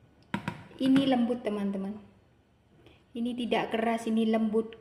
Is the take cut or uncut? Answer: uncut